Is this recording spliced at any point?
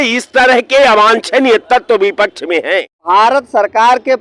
yes; 1 cut; at 3.0 s

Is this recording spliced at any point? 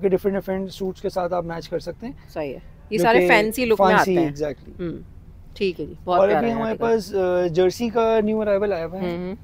no; 0 cuts

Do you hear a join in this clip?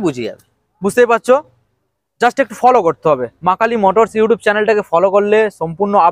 no; 0 cuts

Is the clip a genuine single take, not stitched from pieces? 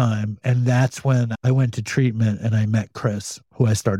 yes; 0 cuts

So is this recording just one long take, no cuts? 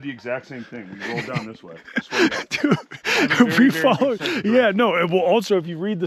yes; 0 cuts

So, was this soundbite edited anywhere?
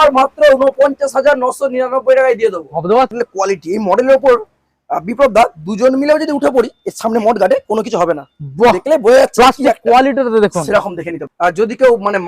yes; 2 cuts; at 3.1 s, 11.2 s

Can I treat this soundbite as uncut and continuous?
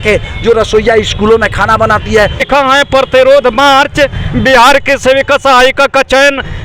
no; 1 cut; at 2.4 s

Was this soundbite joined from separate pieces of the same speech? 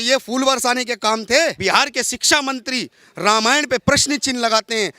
yes; 1 cut; at 1.6 s

